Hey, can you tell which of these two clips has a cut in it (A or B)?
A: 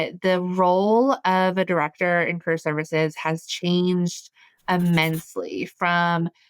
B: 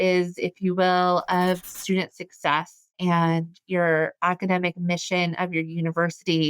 B